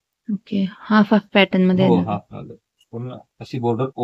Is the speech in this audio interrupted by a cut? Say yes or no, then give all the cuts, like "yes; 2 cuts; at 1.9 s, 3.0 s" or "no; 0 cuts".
no; 0 cuts